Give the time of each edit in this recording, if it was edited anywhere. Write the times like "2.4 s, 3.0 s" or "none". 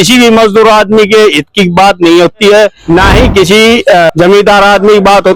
none